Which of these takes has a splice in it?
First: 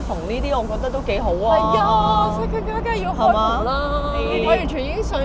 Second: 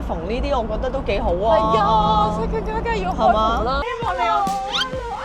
second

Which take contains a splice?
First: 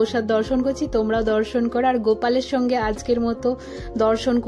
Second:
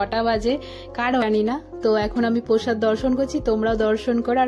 second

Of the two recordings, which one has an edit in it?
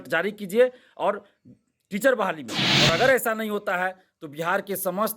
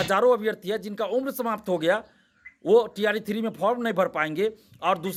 first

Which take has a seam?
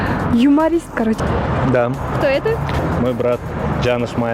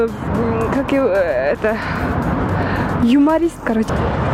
first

